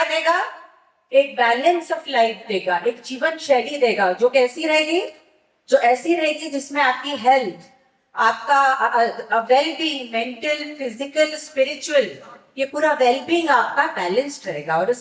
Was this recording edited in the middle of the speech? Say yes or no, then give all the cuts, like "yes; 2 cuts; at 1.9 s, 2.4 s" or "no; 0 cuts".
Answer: no; 0 cuts